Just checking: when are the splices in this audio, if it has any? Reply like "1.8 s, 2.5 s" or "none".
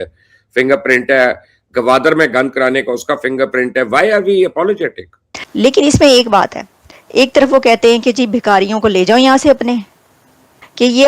5.4 s, 7.0 s